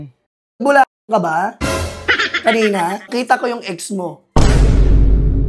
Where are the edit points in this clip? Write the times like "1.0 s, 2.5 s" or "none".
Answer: 3.1 s